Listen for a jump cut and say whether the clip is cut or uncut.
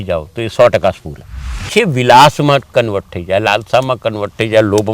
cut